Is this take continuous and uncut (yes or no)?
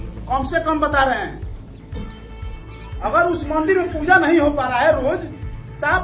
yes